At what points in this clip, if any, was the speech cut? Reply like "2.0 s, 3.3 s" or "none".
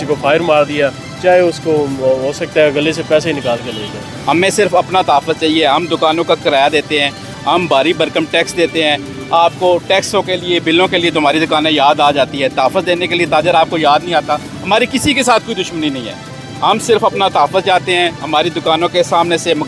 4.1 s